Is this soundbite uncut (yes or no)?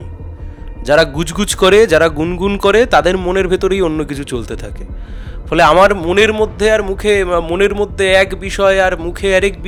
yes